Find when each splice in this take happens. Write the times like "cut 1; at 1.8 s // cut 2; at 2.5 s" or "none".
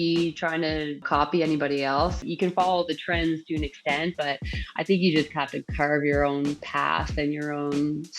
cut 1; at 1.0 s // cut 2; at 2.2 s